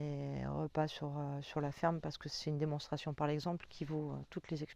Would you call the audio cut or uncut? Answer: uncut